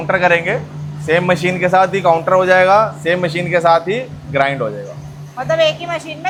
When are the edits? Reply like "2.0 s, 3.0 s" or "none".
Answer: none